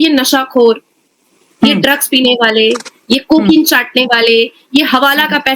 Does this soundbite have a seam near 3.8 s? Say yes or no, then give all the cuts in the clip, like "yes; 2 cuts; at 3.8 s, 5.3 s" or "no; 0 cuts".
no; 0 cuts